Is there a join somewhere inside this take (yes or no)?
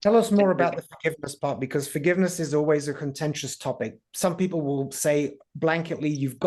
no